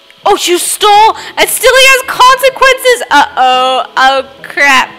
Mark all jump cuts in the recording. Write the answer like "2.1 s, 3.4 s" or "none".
none